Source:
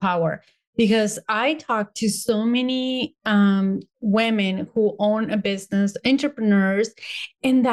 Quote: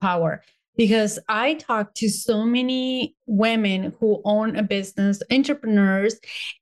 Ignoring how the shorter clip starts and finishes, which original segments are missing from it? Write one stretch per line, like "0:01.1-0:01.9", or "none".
0:03.1-0:03.9